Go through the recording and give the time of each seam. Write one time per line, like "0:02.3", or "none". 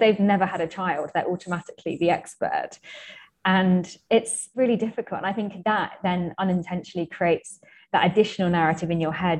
none